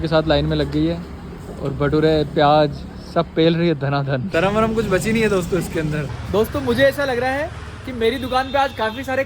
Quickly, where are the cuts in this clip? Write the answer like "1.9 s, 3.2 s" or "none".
none